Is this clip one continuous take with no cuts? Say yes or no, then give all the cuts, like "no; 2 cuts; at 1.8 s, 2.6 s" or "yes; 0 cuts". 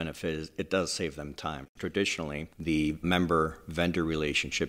no; 2 cuts; at 1.7 s, 3.0 s